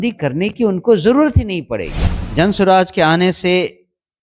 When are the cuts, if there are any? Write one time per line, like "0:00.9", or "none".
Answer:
0:02.3